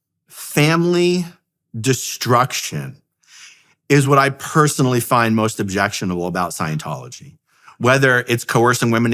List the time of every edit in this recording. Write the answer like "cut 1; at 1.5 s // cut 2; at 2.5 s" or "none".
none